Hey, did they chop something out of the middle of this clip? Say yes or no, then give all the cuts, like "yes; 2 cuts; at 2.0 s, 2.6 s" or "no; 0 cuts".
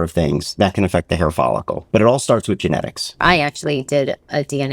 yes; 2 cuts; at 1.8 s, 3.2 s